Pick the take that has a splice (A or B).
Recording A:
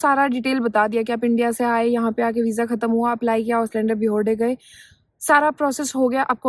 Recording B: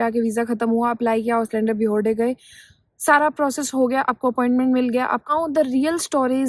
B